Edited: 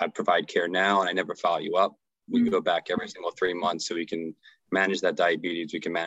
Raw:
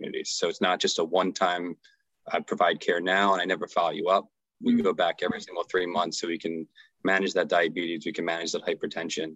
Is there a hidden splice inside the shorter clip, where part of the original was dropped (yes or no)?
no